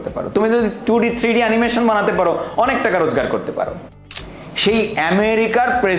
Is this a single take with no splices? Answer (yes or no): no